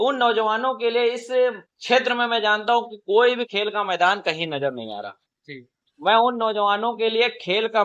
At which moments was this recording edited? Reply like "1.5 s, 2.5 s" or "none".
none